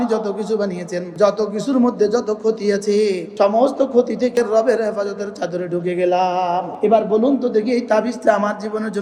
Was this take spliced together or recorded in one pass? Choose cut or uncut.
cut